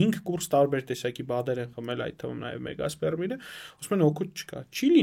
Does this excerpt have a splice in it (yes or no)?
no